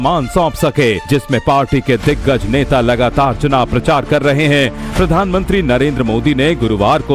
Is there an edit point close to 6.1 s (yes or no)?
yes